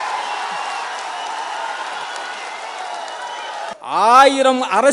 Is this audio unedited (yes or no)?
no